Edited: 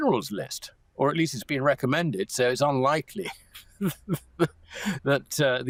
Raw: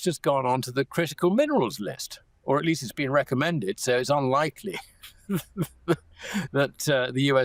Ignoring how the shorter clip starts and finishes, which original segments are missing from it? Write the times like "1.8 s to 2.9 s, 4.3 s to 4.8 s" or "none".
none